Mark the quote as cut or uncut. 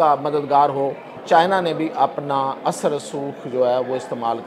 cut